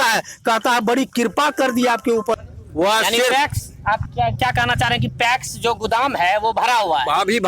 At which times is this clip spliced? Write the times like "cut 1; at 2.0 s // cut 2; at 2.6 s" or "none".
cut 1; at 2.3 s

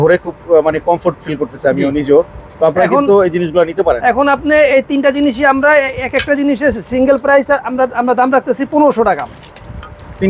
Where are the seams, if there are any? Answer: none

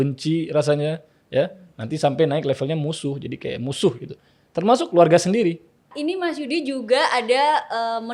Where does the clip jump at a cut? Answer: cut 1; at 5.9 s

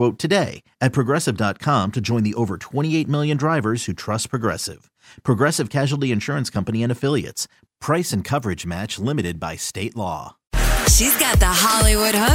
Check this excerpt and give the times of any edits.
cut 1; at 10.7 s

